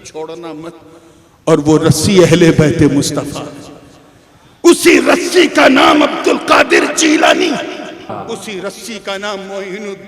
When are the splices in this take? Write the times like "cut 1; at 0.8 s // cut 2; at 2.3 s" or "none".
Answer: cut 1; at 8.1 s